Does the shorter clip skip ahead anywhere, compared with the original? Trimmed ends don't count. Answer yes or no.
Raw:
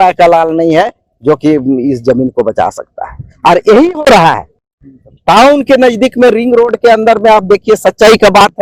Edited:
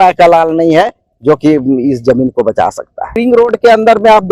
yes